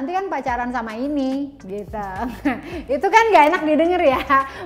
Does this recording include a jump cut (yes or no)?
no